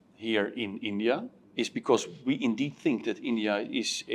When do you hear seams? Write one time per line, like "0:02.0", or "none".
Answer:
0:01.4